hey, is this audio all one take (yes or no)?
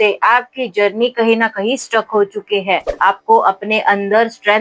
no